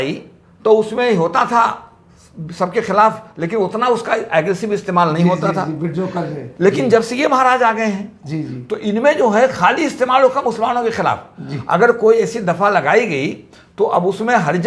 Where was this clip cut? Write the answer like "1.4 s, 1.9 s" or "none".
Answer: none